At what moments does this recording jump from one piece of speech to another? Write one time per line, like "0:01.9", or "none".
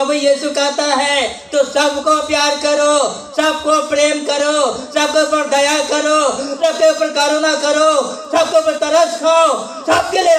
none